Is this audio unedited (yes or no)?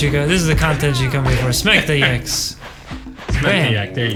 yes